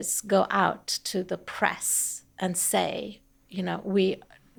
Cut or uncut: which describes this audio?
uncut